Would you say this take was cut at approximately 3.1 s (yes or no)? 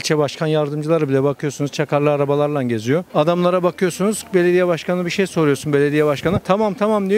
yes